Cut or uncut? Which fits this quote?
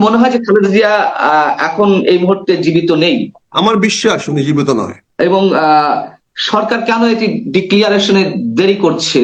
cut